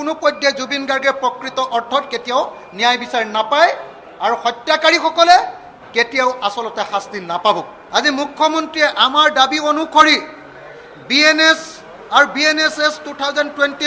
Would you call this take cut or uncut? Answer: cut